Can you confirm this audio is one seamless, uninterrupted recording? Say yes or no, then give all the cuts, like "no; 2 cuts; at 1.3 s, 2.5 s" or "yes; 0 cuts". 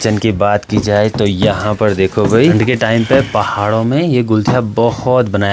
no; 1 cut; at 2.5 s